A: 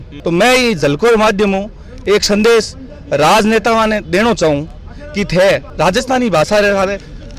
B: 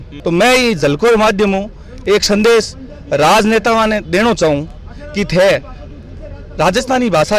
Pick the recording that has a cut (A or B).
A